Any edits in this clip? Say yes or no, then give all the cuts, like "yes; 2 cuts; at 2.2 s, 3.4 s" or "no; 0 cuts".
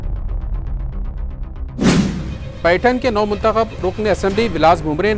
no; 0 cuts